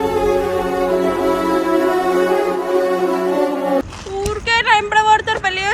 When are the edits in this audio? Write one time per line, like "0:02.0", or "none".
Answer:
0:04.0